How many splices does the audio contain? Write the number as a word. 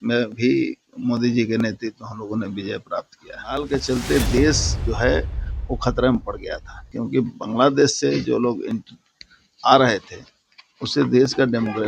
one